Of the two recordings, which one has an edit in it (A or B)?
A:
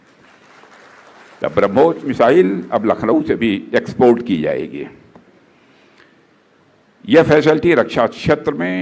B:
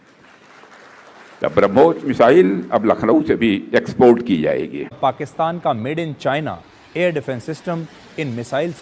B